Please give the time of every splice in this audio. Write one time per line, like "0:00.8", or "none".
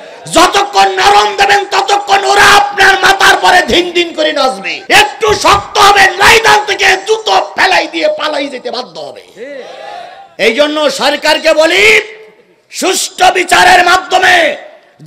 0:04.7
0:10.2